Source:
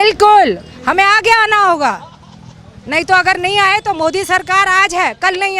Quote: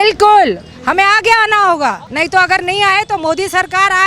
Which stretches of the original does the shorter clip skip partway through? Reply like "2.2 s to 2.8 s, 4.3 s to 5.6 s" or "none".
2.0 s to 2.8 s